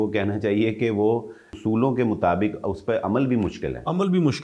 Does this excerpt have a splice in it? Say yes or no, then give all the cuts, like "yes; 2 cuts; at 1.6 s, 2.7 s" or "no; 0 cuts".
yes; 1 cut; at 1.5 s